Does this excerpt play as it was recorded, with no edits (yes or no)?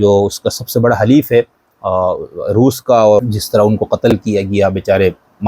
no